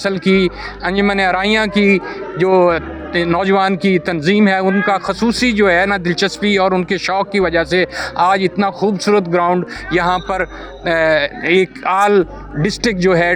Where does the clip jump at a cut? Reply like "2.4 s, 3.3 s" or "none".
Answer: none

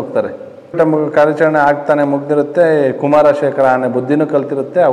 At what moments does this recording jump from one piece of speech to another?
none

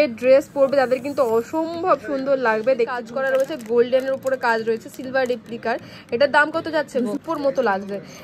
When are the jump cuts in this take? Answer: 3.1 s, 7.2 s

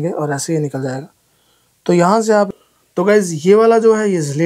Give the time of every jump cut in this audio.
2.5 s

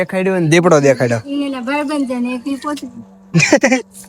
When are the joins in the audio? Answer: none

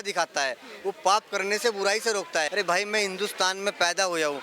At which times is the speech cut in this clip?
2.5 s

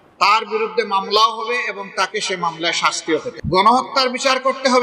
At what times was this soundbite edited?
3.4 s

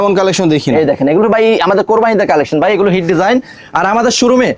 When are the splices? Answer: none

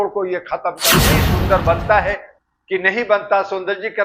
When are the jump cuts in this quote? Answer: 1.0 s

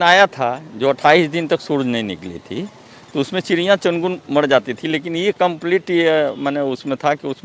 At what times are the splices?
none

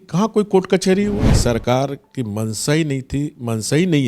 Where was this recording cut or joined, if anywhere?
1.4 s

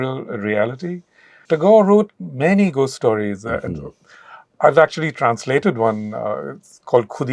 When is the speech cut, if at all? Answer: 1.4 s

